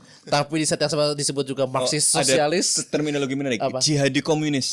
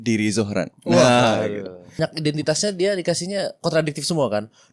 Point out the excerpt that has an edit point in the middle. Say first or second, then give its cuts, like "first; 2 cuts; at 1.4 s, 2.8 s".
second; 1 cut; at 2.0 s